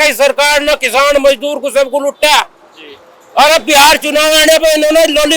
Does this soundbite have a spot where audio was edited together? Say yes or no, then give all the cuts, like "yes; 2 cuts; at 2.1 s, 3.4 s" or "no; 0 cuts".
no; 0 cuts